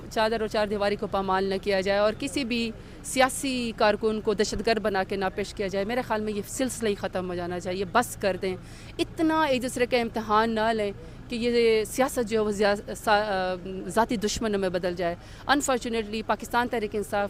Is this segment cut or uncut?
uncut